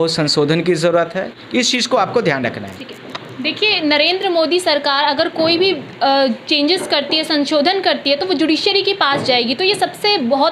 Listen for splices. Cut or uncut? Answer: uncut